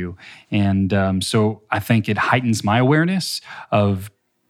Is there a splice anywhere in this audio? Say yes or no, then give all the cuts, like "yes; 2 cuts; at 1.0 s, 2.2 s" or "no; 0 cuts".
no; 0 cuts